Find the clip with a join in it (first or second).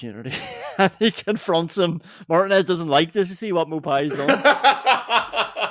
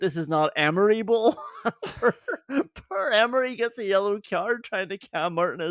first